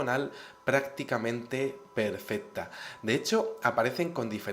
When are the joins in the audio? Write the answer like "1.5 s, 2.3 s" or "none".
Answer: 0.9 s